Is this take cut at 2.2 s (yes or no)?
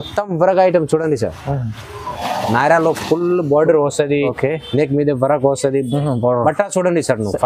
yes